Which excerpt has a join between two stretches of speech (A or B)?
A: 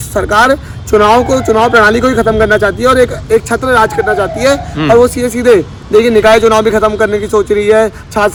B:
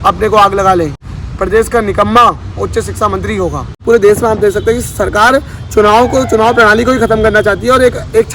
B